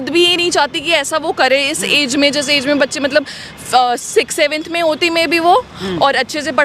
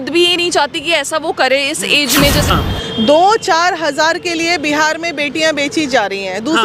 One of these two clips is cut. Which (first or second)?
second